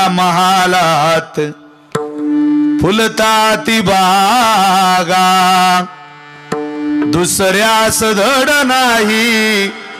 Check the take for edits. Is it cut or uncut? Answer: uncut